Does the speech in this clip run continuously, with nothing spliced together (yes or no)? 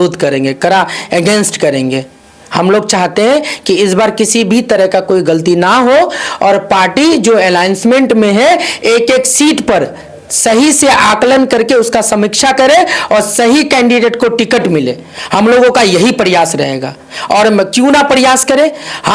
yes